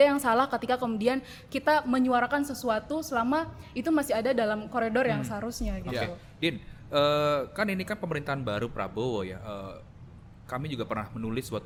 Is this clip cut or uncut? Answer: uncut